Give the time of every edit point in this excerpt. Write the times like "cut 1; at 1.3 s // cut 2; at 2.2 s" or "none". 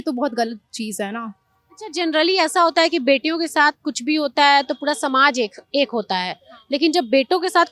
none